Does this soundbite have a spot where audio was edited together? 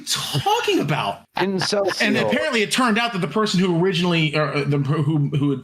yes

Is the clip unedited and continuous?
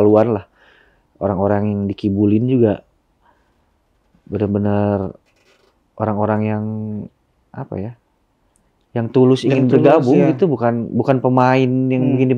yes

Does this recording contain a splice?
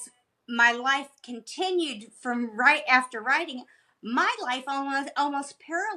no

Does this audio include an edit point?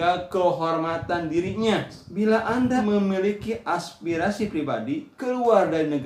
yes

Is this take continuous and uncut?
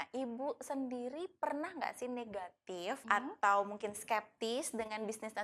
no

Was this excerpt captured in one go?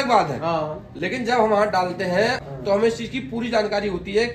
no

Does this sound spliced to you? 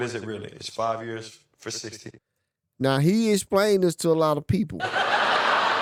no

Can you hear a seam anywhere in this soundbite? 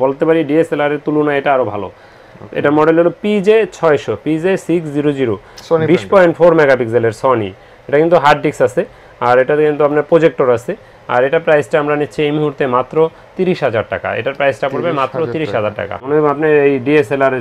no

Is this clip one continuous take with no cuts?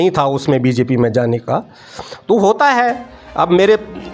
yes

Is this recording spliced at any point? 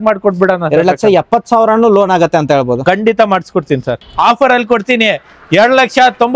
yes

